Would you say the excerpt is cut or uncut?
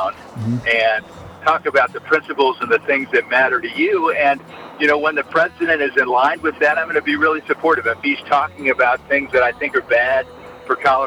uncut